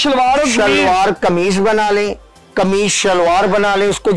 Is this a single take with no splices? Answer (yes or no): yes